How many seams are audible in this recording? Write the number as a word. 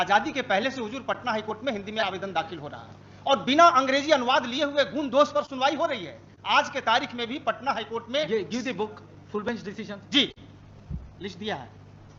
zero